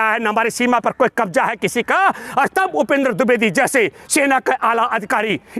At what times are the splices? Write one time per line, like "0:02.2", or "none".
none